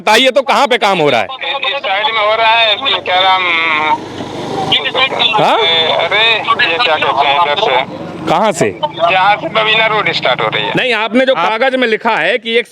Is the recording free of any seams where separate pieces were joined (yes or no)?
yes